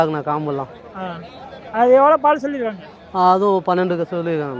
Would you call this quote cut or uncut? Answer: uncut